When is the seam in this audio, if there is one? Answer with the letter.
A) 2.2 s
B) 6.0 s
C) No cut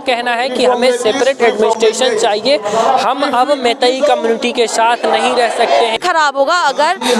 B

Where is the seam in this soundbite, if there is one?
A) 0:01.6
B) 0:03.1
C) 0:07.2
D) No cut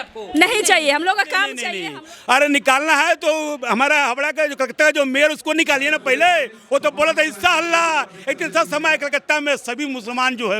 A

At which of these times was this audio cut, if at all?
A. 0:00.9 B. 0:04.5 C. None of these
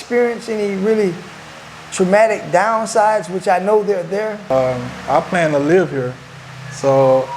B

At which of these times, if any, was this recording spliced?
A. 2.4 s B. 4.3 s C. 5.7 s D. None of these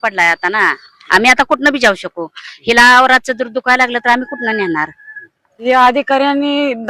C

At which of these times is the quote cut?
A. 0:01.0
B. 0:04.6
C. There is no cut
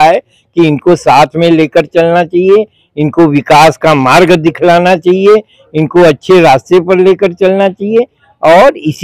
C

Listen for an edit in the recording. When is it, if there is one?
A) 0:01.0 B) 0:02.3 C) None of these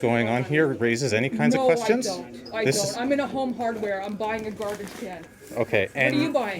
C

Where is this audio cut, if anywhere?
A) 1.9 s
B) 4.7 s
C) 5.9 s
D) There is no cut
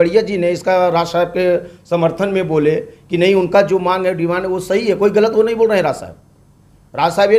D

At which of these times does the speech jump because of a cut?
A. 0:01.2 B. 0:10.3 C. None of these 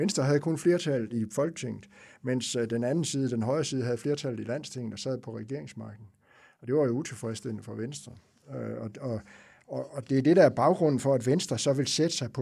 A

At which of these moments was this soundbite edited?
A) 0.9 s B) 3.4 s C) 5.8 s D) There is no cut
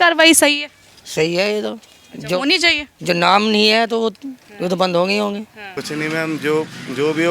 C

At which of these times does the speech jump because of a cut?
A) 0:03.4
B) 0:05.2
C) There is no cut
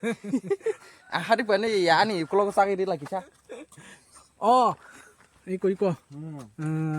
B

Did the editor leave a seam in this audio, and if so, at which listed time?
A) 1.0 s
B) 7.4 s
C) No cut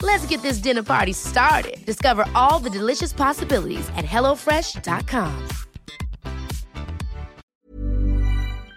B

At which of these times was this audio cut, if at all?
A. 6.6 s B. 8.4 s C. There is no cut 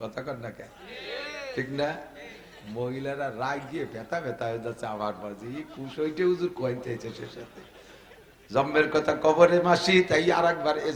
C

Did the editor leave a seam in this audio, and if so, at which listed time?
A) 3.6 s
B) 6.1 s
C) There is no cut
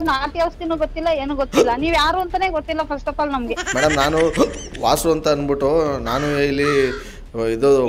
C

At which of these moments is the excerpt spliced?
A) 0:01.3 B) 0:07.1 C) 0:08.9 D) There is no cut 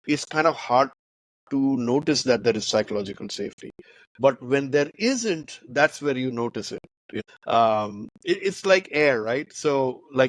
B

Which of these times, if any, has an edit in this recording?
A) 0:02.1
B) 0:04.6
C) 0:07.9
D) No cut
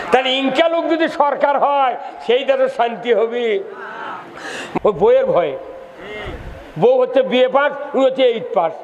B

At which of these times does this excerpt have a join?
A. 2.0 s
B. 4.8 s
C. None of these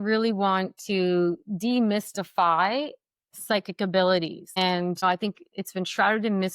B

